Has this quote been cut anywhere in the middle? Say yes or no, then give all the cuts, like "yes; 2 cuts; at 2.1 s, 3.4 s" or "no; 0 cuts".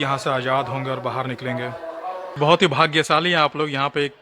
yes; 1 cut; at 2.4 s